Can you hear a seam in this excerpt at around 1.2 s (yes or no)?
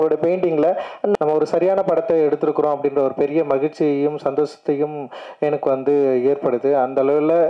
yes